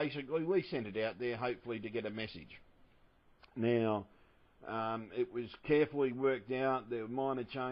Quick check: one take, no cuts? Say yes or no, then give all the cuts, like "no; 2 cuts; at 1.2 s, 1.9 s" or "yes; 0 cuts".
yes; 0 cuts